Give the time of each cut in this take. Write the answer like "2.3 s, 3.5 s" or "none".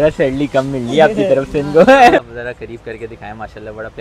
2.2 s